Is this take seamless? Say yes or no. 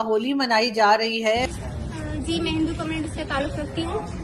no